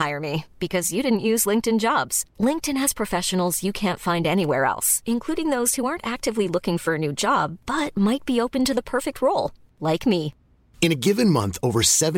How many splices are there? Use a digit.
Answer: 0